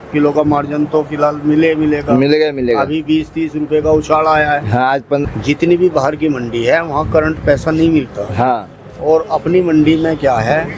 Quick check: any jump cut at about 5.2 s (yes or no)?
yes